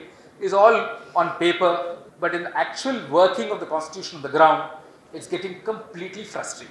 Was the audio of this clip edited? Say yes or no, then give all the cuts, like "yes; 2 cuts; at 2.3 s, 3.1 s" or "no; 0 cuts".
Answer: yes; 1 cut; at 2.0 s